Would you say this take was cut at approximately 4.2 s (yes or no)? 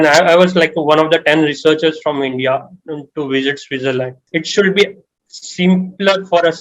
yes